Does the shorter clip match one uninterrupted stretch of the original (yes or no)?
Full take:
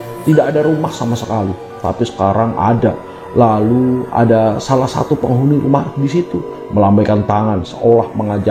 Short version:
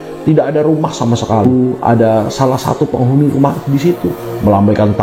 no